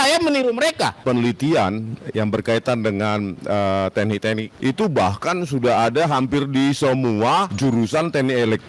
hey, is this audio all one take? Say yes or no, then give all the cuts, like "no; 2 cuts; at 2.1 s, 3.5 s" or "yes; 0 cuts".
no; 3 cuts; at 1.0 s, 4.5 s, 7.5 s